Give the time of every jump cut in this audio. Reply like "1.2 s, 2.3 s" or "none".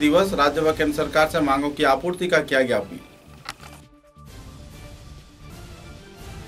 none